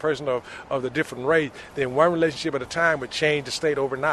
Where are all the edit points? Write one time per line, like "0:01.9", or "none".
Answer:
0:03.1